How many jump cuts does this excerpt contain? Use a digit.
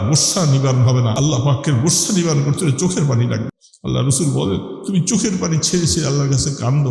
2